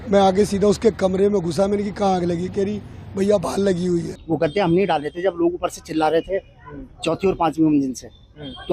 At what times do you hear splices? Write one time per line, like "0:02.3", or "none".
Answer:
0:04.2